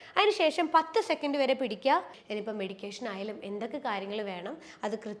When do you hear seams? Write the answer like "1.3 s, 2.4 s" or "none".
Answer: 2.2 s